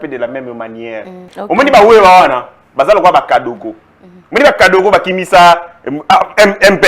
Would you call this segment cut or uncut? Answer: cut